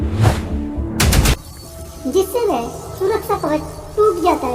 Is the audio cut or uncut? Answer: cut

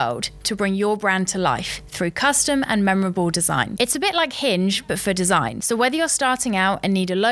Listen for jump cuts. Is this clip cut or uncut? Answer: uncut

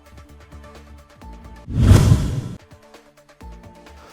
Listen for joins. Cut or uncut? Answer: cut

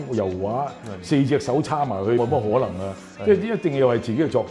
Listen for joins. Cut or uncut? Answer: cut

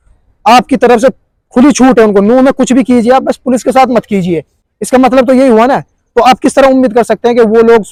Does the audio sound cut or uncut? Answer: uncut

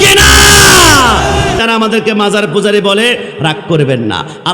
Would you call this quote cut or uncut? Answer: cut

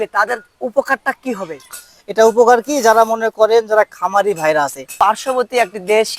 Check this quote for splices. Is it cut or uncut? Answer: cut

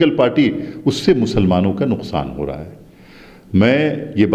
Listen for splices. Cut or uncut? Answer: uncut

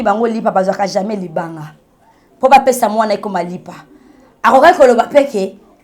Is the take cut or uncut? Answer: uncut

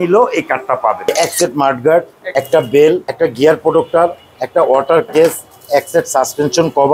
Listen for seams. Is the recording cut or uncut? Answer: cut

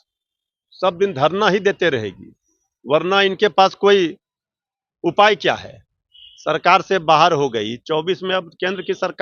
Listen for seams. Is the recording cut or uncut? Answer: uncut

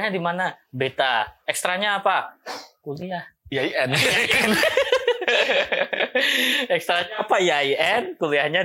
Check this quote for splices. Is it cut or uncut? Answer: uncut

